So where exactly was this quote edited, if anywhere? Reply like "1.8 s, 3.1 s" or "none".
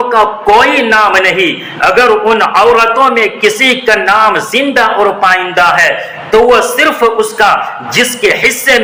none